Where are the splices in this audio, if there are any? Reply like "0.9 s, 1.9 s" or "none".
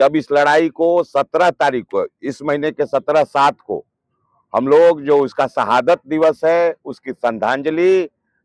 none